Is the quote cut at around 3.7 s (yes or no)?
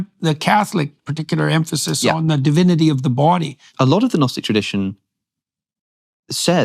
yes